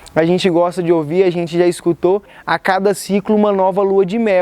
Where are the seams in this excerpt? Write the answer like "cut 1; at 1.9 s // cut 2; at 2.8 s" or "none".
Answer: cut 1; at 2.3 s